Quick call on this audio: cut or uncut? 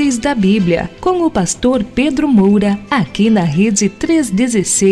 cut